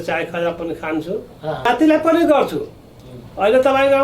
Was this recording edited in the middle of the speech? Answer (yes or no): yes